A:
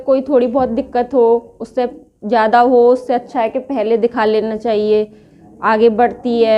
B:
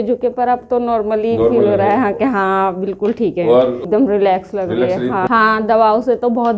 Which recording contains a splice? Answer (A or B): B